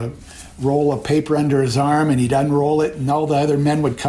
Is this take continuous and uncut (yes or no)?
yes